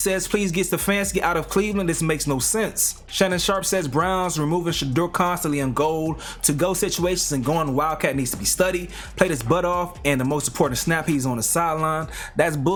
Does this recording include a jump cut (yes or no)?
no